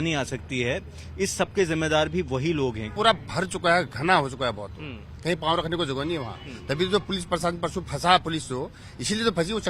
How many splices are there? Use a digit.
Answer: 1